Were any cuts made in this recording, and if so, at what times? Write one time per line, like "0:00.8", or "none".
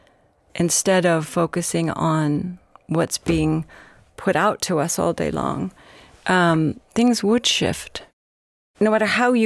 0:08.2

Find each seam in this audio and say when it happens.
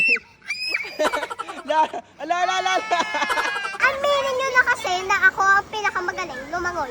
0:03.7

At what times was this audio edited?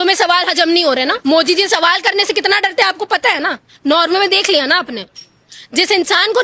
0:01.2

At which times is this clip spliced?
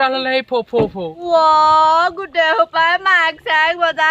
0:01.1

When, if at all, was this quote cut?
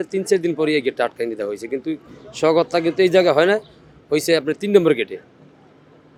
none

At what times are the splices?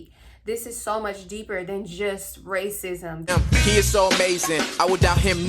0:03.2

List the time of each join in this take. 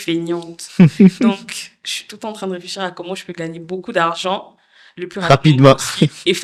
none

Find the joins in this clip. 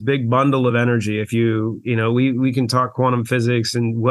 none

